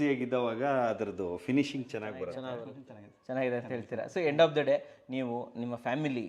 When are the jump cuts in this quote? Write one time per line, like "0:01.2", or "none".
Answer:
0:02.7